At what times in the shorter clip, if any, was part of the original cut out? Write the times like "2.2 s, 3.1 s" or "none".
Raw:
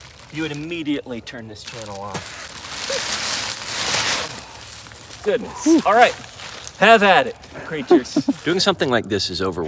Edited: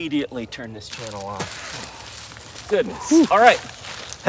1.8 s